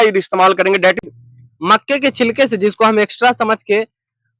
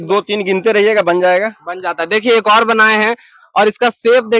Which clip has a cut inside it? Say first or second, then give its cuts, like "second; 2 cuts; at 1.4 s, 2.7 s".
first; 1 cut; at 1.0 s